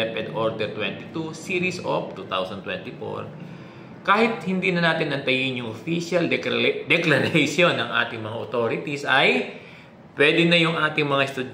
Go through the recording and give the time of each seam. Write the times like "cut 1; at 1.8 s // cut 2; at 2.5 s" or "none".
none